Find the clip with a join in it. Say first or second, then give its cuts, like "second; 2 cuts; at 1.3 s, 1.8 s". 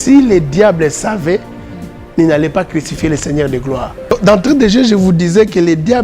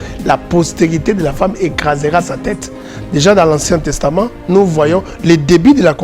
first; 1 cut; at 4.0 s